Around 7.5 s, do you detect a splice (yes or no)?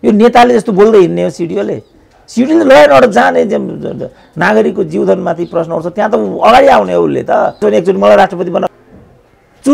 yes